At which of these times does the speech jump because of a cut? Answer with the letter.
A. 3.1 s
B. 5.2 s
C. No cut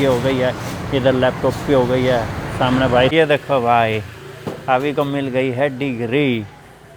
A